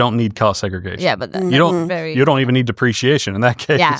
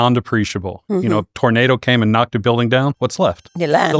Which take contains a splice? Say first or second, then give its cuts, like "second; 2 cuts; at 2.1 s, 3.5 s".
second; 1 cut; at 3.1 s